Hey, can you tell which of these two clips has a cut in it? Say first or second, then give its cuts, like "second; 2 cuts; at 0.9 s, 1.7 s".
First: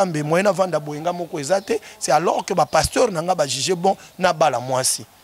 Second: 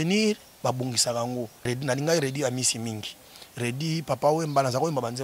second; 1 cut; at 1.7 s